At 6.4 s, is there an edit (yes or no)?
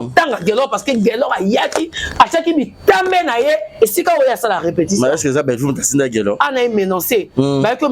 yes